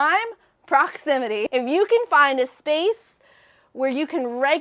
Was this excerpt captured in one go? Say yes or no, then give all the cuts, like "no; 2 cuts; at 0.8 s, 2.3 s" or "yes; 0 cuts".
no; 1 cut; at 1.5 s